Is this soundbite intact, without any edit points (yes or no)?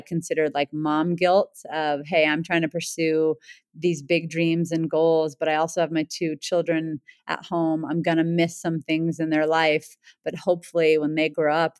yes